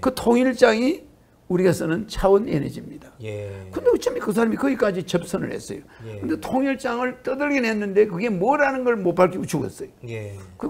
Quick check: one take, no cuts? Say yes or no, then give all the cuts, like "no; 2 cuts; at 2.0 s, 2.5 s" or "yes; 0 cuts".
yes; 0 cuts